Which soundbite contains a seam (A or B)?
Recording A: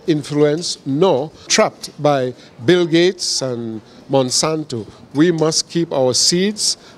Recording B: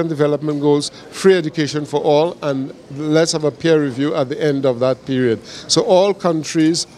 A